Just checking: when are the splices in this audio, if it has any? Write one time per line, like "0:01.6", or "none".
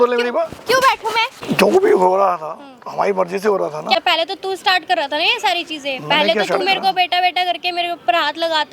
0:01.6
0:04.0